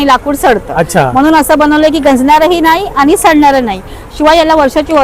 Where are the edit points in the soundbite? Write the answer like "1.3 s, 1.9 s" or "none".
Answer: none